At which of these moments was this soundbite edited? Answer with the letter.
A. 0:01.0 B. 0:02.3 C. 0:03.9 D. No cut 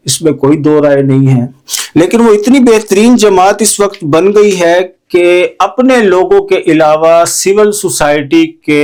D